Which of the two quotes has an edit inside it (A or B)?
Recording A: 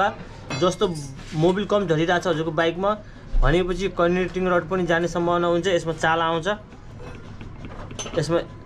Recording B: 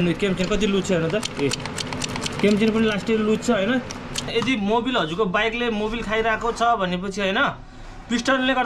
B